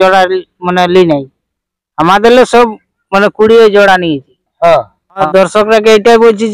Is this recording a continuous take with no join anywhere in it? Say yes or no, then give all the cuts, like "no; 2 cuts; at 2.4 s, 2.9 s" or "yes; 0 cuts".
no; 1 cut; at 5.0 s